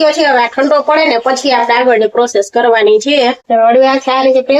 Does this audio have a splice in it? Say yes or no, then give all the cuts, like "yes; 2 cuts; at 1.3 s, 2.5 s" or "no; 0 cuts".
yes; 1 cut; at 3.4 s